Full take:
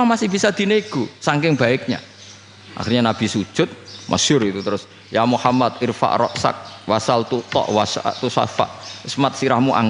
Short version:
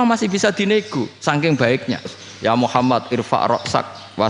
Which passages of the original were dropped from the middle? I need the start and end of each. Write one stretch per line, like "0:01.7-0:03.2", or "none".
0:02.2-0:04.9